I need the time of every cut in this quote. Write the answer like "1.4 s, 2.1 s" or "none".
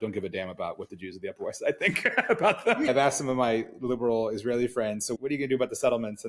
2.9 s, 5.1 s